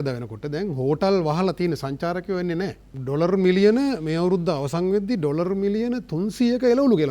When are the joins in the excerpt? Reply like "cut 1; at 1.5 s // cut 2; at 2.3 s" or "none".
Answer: cut 1; at 2.9 s